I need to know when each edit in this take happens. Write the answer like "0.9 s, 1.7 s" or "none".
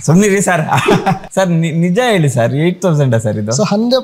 1.2 s